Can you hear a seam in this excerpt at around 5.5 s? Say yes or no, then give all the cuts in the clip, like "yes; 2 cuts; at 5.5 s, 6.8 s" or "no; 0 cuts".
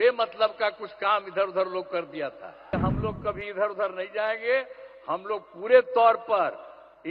no; 1 cut; at 2.7 s